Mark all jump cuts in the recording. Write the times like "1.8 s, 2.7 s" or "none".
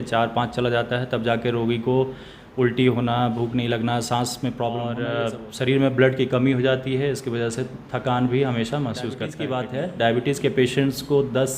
5.0 s, 9.3 s

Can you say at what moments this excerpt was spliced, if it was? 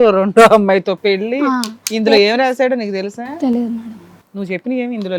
none

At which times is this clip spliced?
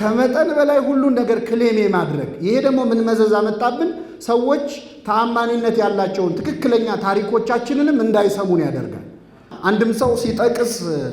9.5 s

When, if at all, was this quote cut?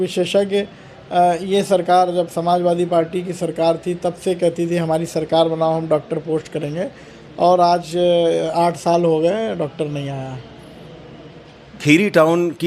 none

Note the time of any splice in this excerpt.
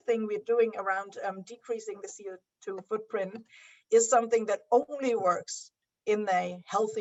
none

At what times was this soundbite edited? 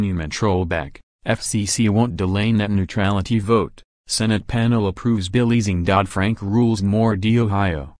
6.8 s

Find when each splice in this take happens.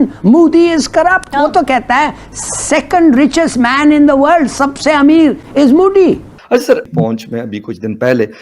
5.4 s, 6.3 s

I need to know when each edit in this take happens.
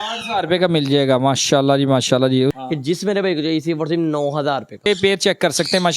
2.5 s, 4.9 s

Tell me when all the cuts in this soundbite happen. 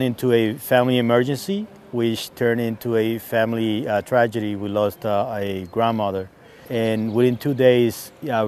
6.5 s

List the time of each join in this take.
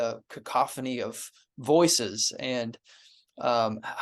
none

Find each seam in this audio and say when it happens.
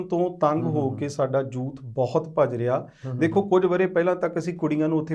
none

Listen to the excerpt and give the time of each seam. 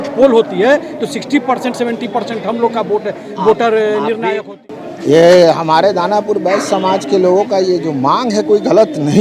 4.5 s

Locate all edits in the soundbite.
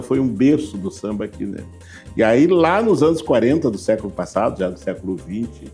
none

